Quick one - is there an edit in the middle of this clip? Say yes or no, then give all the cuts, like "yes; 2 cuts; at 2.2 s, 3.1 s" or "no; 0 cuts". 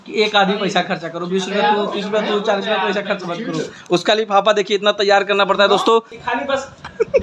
yes; 1 cut; at 6.2 s